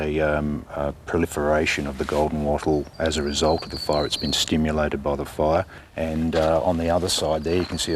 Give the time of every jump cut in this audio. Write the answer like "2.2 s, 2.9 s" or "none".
5.8 s

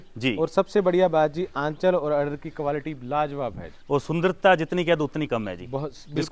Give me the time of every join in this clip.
none

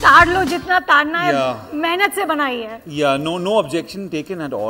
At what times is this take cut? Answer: none

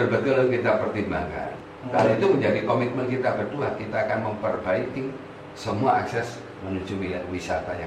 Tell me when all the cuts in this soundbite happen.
1.5 s

